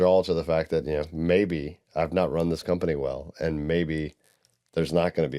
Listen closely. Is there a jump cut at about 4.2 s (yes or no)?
no